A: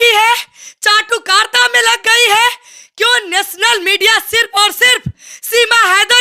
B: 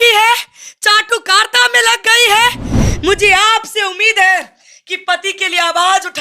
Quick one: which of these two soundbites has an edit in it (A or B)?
B